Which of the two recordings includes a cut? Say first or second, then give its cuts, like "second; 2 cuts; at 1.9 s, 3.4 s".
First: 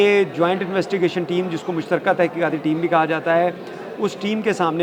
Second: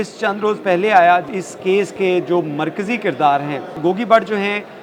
second; 2 cuts; at 1.3 s, 3.8 s